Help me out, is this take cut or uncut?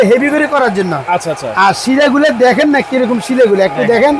uncut